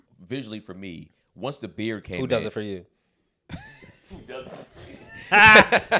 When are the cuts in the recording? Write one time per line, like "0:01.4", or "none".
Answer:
none